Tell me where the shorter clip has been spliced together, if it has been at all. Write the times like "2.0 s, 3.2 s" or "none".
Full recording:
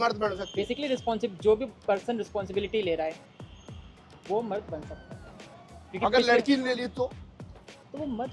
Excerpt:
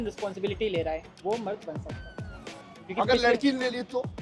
1.1 s

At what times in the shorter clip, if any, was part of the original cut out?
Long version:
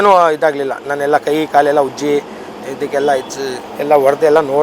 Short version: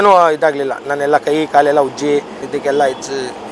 2.4 s

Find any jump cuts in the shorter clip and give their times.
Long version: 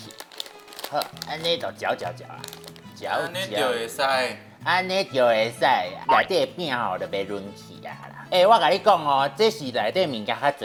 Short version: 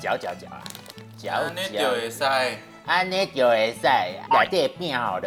none

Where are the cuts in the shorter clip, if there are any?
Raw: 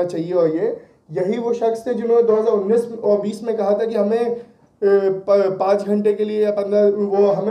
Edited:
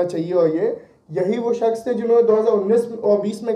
none

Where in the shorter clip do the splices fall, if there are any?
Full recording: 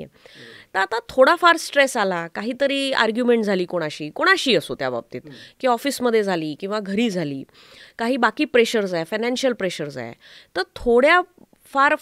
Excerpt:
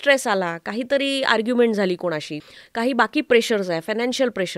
2.3 s

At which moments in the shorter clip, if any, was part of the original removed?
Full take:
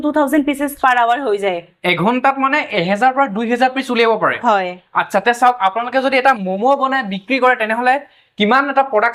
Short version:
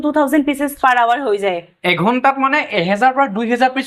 none

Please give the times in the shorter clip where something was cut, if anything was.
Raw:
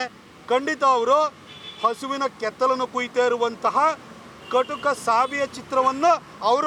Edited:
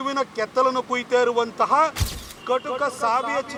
none

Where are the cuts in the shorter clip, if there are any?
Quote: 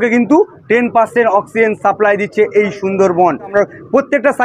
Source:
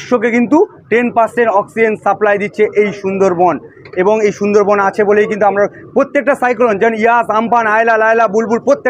3.5 s

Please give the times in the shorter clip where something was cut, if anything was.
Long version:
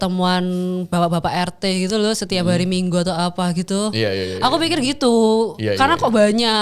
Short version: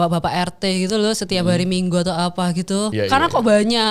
2.9 s

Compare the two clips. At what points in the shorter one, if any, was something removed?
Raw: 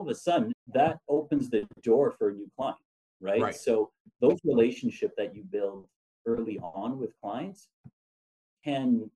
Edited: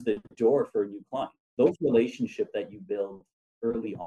1.4 s

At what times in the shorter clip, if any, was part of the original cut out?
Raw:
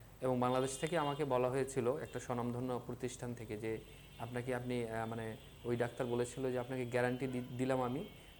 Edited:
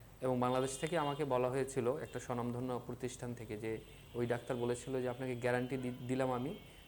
4.0 s

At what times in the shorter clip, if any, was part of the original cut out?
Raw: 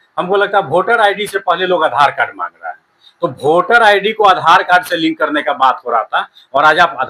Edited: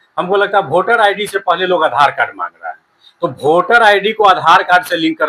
none

